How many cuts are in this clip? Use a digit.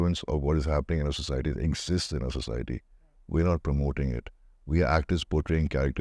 0